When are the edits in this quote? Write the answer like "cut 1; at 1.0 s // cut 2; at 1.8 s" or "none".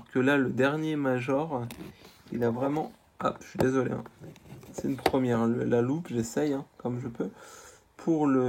none